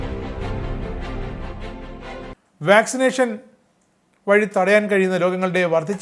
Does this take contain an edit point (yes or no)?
yes